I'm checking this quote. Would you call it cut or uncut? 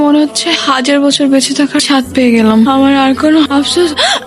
uncut